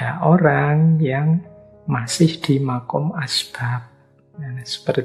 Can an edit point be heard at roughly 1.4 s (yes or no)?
no